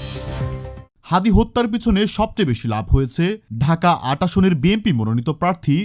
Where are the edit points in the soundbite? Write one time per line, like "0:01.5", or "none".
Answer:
0:00.9